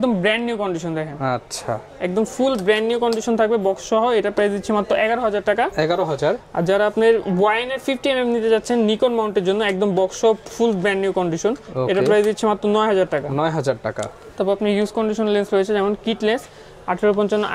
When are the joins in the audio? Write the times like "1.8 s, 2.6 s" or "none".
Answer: none

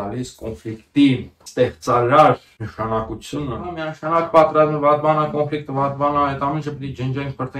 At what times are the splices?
1.4 s, 2.6 s, 3.9 s

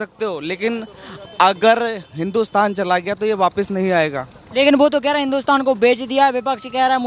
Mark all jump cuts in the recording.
none

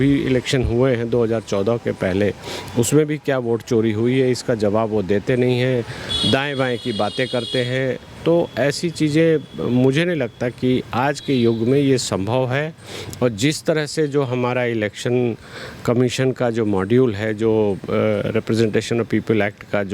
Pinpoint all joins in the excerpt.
none

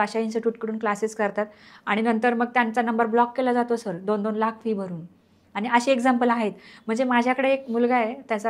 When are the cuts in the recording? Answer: none

